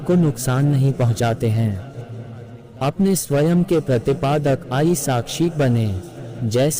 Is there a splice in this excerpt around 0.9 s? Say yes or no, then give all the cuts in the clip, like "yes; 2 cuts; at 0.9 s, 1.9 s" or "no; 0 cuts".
no; 1 cut; at 2.6 s